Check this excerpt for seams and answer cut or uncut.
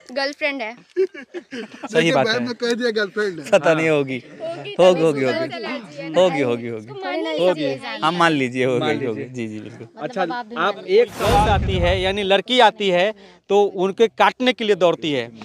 cut